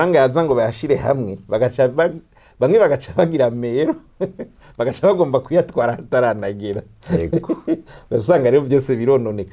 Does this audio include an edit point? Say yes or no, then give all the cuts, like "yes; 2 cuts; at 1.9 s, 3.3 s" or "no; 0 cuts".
no; 0 cuts